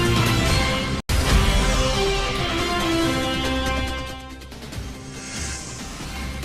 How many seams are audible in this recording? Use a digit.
1